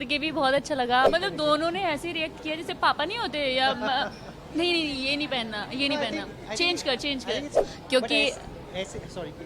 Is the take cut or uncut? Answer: cut